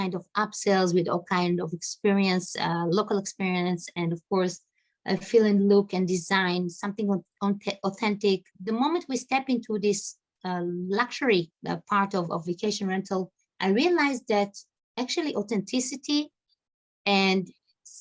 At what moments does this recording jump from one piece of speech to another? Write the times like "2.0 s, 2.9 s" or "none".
8.5 s, 11.6 s